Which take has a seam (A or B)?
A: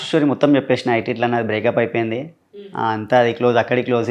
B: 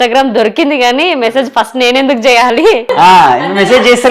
B